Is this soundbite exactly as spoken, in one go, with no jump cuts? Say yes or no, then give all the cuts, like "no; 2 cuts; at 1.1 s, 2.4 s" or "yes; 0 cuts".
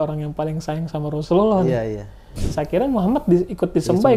no; 1 cut; at 2.4 s